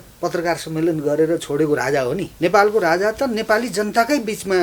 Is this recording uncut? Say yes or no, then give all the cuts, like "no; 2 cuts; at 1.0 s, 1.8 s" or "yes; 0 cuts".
no; 1 cut; at 2.3 s